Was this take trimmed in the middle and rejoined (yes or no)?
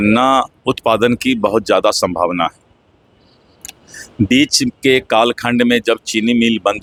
no